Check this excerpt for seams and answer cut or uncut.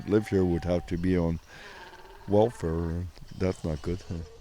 cut